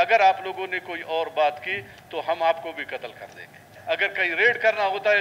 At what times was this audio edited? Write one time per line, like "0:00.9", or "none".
0:03.7